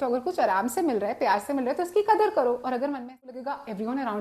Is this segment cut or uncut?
cut